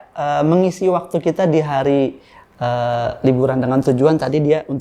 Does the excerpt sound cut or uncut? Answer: uncut